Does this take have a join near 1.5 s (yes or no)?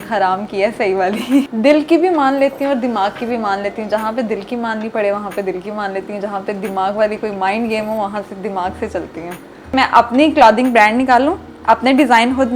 yes